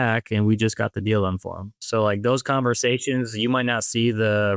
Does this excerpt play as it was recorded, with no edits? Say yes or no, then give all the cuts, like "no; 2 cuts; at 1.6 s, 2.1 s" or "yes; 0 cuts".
yes; 0 cuts